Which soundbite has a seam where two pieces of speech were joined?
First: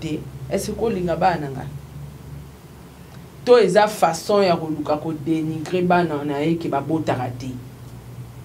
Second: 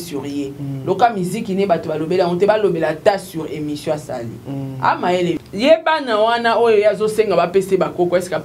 second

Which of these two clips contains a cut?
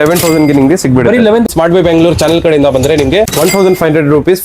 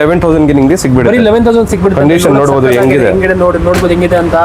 first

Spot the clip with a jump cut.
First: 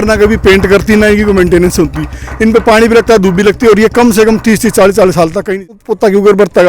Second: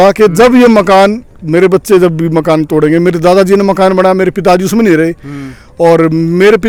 first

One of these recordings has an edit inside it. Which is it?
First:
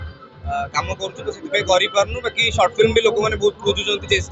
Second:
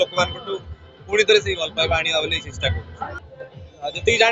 second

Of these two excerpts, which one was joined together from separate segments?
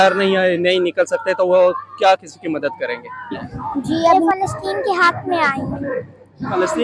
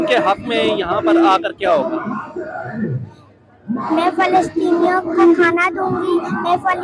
first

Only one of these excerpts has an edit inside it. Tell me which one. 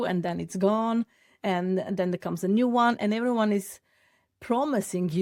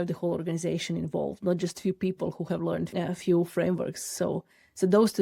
second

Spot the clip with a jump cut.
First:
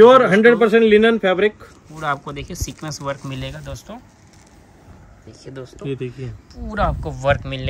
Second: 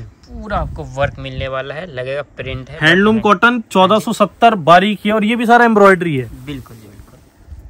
first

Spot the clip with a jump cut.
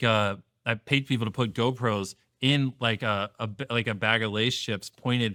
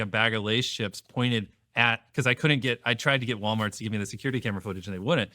second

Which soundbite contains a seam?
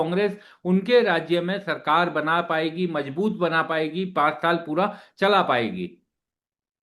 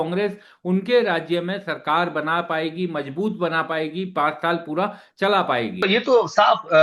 second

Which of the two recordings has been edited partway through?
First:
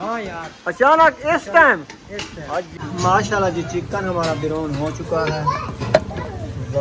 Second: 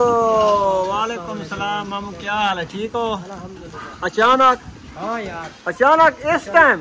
first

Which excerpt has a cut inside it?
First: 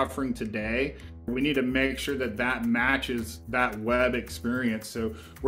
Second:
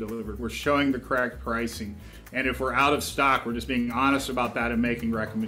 first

